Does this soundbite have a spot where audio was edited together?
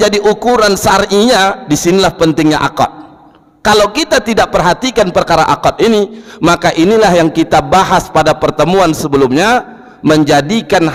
no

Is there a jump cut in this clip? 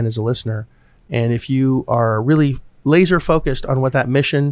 yes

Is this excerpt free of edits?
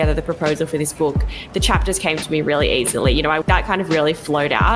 no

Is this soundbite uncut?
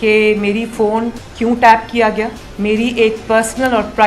no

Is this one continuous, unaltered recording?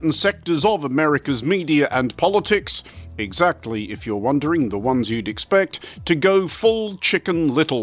yes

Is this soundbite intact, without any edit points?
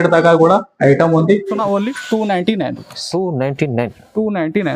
no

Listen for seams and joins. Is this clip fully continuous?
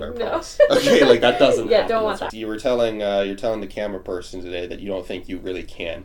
no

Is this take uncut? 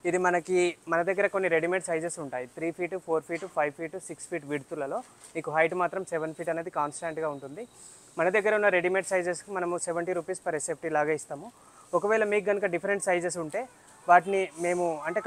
yes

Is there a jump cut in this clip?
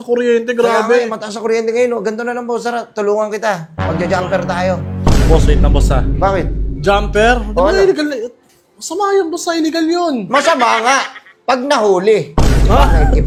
no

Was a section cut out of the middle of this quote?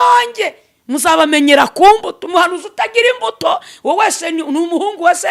no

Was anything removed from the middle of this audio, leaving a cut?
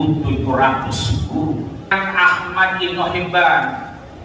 yes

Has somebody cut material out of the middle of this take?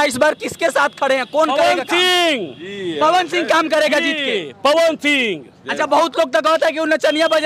no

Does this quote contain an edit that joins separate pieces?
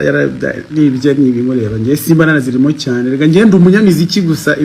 no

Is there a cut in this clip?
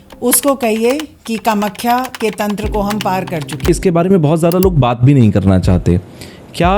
yes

